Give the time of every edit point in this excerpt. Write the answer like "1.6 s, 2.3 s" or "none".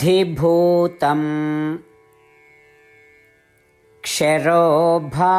2.4 s, 4.0 s